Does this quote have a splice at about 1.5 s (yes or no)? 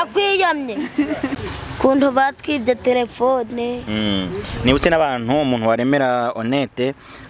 yes